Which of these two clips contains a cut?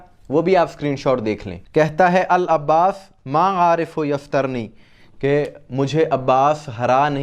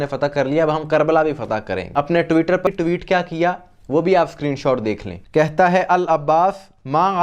second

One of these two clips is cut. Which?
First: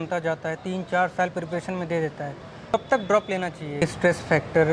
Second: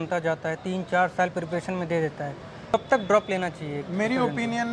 first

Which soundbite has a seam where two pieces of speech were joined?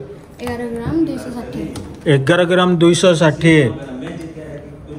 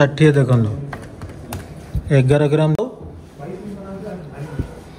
second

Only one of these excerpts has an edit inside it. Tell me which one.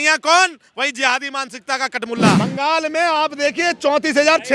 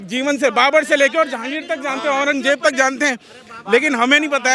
first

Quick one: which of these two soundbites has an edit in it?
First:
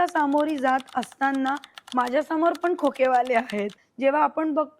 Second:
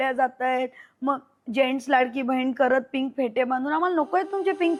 first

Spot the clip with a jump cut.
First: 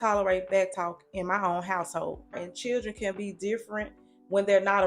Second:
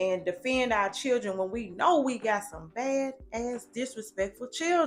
first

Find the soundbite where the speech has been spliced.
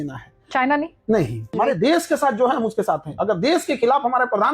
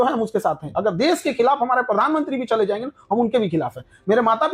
first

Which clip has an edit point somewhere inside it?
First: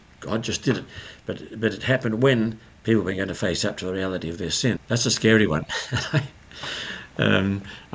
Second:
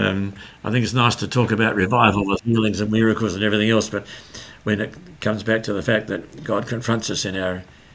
first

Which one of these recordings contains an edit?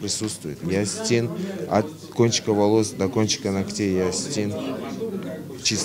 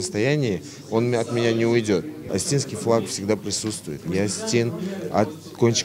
second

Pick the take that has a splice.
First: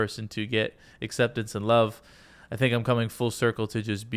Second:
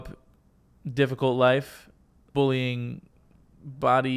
second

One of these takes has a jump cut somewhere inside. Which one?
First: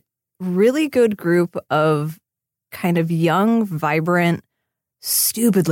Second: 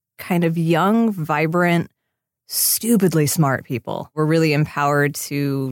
second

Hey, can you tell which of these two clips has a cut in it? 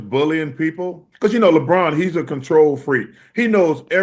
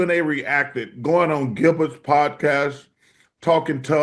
first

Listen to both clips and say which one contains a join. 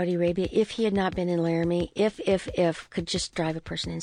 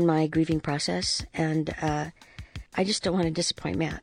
second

